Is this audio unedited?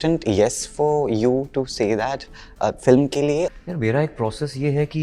no; 1 cut; at 3.5 s

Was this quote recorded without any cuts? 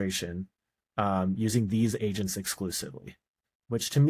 yes; 0 cuts

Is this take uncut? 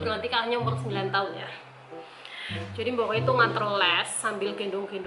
yes; 0 cuts

